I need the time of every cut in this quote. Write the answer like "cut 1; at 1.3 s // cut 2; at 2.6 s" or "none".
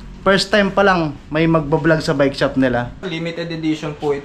cut 1; at 3.1 s